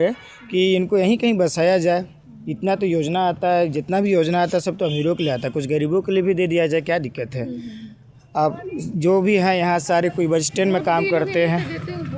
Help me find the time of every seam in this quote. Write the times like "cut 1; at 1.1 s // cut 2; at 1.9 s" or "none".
none